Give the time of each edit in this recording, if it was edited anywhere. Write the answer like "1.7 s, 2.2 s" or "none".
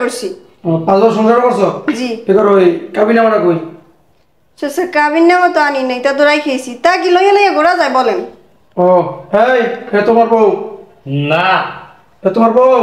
none